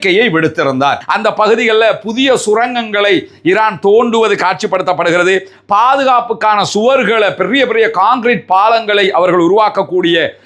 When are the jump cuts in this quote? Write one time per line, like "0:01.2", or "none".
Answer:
0:01.0